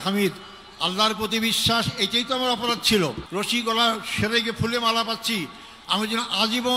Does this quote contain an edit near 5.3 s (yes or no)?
no